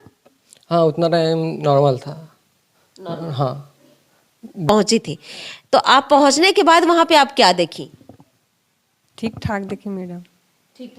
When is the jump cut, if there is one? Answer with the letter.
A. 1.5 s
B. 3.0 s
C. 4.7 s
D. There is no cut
C